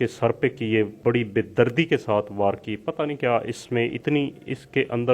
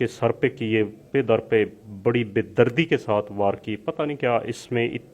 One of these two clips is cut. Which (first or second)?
first